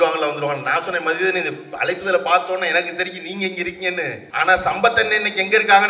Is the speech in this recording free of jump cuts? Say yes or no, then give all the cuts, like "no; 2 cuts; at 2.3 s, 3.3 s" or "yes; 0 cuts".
no; 1 cut; at 4.2 s